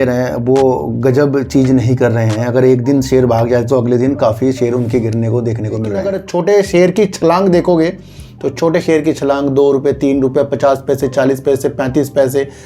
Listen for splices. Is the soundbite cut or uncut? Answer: cut